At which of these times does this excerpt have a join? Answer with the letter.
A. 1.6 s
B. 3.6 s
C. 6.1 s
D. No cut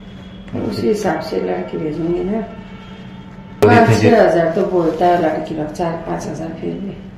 B